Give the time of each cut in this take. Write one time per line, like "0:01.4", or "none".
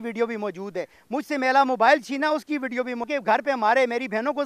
0:03.1